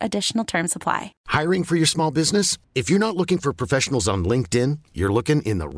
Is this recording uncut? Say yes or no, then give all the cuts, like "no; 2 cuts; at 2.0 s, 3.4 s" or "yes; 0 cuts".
no; 1 cut; at 1.1 s